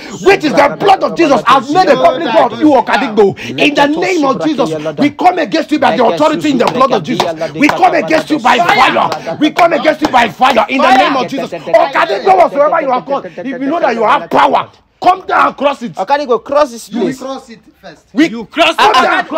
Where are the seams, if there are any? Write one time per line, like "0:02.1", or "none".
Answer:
none